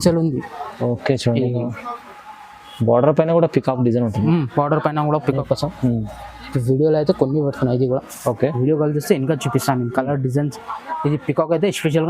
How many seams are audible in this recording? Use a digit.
1